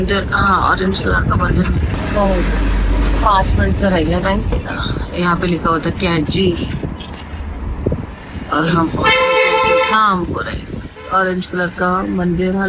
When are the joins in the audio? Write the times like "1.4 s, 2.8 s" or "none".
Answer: none